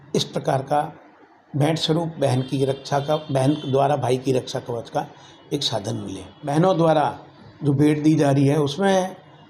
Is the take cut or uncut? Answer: cut